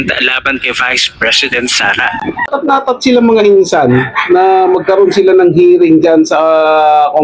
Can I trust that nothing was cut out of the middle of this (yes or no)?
no